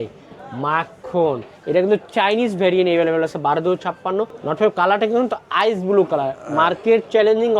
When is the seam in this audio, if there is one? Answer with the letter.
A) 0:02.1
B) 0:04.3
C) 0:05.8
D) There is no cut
B